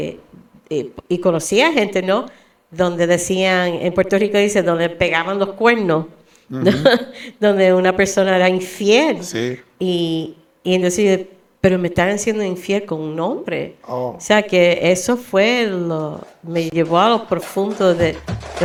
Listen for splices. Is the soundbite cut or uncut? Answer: uncut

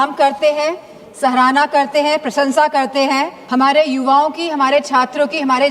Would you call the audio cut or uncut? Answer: cut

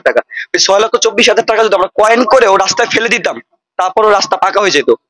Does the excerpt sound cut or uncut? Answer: uncut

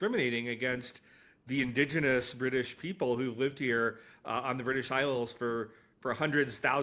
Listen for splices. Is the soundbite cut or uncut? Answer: uncut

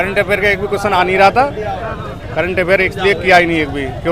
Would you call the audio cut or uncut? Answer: uncut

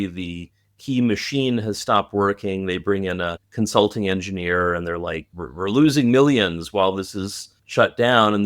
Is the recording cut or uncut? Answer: uncut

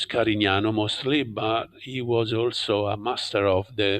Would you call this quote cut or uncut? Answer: uncut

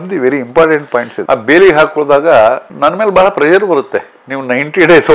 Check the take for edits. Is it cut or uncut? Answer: cut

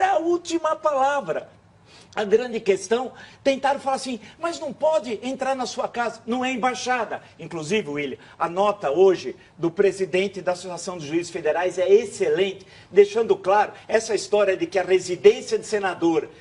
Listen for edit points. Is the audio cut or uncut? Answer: cut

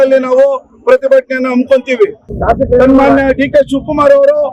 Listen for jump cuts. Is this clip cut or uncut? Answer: uncut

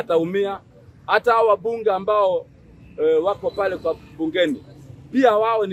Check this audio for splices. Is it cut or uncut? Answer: uncut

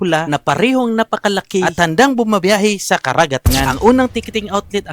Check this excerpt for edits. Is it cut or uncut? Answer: cut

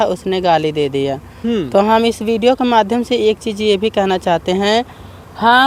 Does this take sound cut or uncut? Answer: uncut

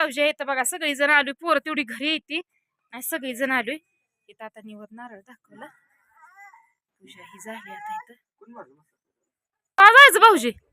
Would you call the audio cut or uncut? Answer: cut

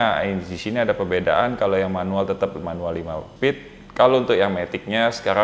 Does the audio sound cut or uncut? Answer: uncut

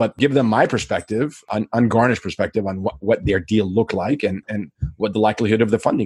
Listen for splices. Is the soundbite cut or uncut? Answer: uncut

